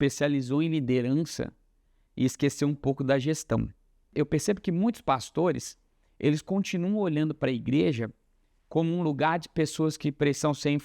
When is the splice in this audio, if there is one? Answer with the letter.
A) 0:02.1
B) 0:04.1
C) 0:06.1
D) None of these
B